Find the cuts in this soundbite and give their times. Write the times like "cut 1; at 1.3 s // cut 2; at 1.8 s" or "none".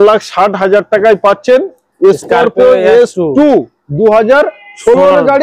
none